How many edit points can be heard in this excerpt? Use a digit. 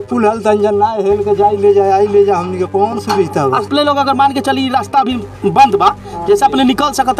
1